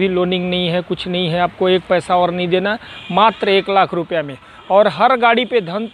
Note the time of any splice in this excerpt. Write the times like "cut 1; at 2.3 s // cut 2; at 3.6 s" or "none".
none